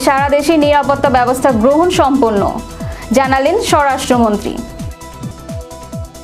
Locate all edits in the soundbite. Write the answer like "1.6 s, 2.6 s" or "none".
none